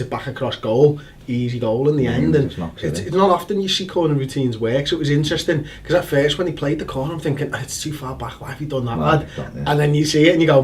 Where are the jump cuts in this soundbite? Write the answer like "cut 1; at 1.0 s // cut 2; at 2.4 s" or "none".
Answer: cut 1; at 9.4 s